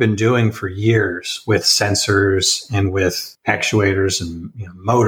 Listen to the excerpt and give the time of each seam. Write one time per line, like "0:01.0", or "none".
0:03.3